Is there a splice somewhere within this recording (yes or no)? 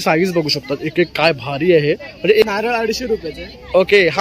yes